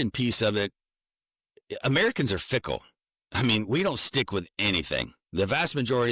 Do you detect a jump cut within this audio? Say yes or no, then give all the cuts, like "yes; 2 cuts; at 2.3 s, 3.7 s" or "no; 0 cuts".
no; 0 cuts